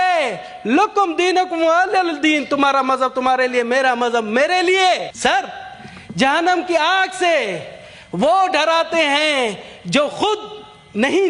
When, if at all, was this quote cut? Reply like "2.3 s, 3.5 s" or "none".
5.1 s

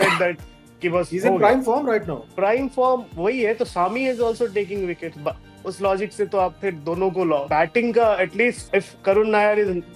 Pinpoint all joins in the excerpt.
2.2 s, 7.5 s, 8.6 s

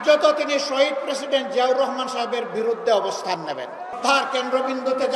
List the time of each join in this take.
3.9 s

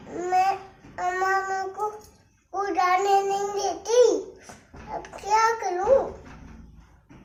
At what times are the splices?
none

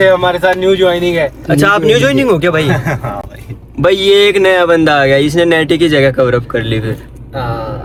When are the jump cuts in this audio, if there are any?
none

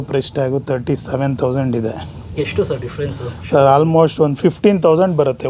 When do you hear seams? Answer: 2.2 s

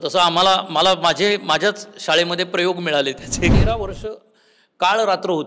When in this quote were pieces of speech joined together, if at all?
3.5 s

